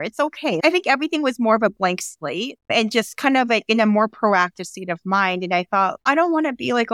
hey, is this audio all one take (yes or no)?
yes